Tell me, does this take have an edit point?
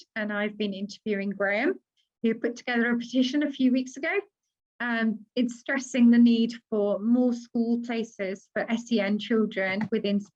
no; 0 cuts

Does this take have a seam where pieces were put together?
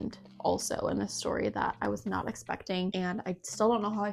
no; 0 cuts

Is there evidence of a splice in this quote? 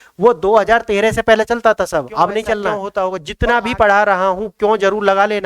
yes; 1 cut; at 2.8 s

